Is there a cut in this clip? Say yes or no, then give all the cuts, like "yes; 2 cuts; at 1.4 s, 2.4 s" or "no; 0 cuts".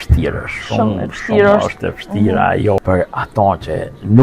yes; 1 cut; at 2.8 s